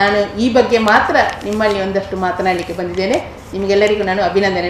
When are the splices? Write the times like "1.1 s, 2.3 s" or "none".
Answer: none